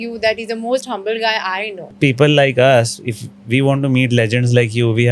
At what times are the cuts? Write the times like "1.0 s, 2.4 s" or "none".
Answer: 1.9 s